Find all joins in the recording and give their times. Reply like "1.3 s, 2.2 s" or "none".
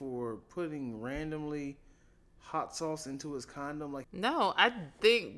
4.1 s